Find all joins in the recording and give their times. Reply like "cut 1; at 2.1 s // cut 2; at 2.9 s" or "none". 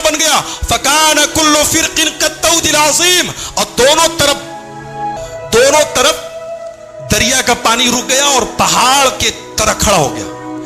cut 1; at 5.2 s

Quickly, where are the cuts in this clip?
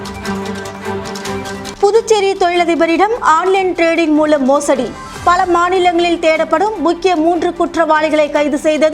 cut 1; at 1.3 s

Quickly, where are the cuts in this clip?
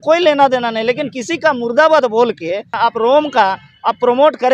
cut 1; at 2.8 s

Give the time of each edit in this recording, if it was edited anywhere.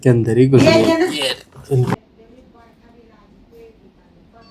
cut 1; at 1.9 s

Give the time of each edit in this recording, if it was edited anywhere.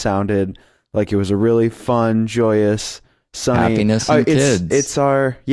cut 1; at 2.2 s

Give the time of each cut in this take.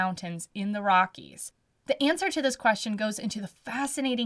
none

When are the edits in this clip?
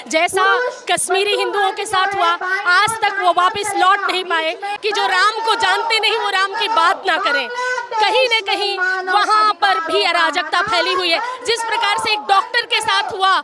cut 1; at 4.7 s

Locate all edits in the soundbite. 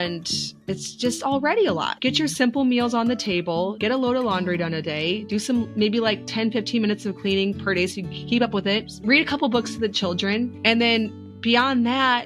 cut 1; at 1.9 s // cut 2; at 3.7 s // cut 3; at 8.9 s // cut 4; at 10.6 s

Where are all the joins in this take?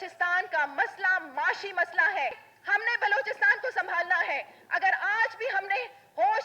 cut 1; at 2.5 s

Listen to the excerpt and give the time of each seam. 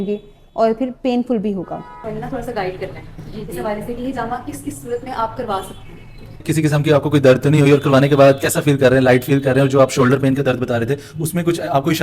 cut 1; at 2.0 s // cut 2; at 6.4 s

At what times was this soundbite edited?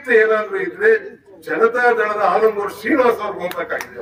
none

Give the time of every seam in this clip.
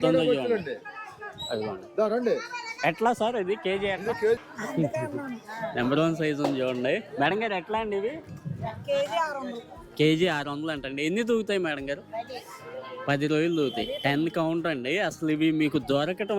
cut 1; at 4.4 s

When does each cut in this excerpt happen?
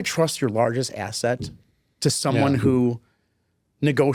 none

